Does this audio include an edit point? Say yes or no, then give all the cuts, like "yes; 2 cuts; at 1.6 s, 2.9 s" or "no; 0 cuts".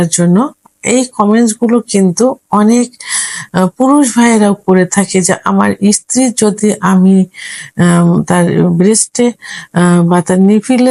no; 0 cuts